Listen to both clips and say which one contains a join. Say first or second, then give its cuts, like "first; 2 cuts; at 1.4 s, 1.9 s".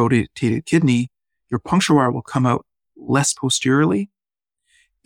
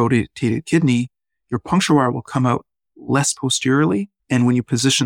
second; 1 cut; at 4.2 s